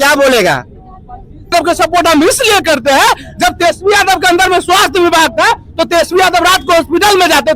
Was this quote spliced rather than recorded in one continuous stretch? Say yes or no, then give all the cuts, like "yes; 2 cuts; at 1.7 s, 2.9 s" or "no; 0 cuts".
yes; 1 cut; at 1.5 s